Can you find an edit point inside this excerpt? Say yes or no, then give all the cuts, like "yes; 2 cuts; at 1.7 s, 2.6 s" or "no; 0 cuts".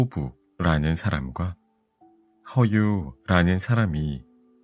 no; 0 cuts